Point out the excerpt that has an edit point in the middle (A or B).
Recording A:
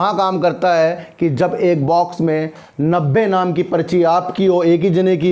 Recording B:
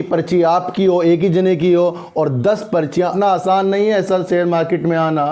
B